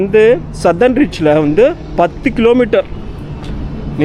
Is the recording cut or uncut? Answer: uncut